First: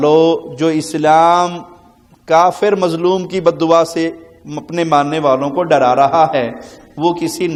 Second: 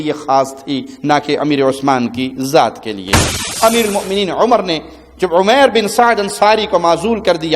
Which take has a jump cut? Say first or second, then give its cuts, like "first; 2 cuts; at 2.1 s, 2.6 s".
second; 1 cut; at 3.4 s